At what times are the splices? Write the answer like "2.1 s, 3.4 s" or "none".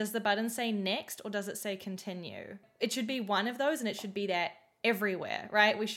2.6 s